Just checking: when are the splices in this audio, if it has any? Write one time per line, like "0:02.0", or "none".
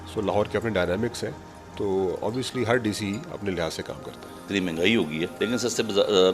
0:04.4
0:05.3